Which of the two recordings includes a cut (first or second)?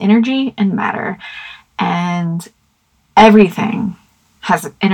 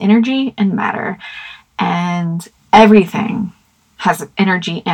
second